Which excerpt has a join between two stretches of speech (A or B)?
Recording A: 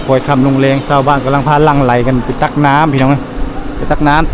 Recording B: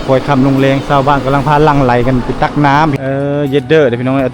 B